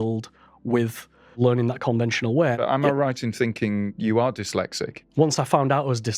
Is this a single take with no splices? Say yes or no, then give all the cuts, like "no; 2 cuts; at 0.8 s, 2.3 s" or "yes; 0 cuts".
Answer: no; 4 cuts; at 1.4 s, 2.6 s, 3.9 s, 4.9 s